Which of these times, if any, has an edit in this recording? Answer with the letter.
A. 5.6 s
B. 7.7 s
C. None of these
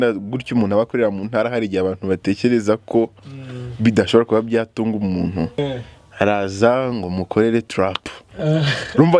A